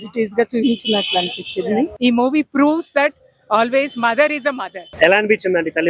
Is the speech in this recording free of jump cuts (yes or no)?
no